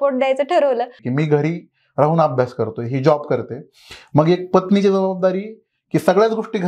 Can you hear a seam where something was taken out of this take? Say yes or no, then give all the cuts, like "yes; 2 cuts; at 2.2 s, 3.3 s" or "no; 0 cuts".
yes; 1 cut; at 1.0 s